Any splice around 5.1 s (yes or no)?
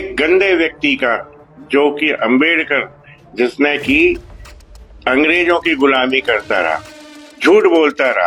no